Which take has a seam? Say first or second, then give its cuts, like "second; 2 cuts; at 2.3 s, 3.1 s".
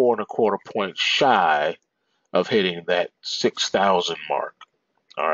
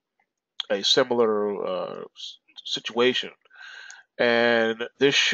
first; 1 cut; at 3.2 s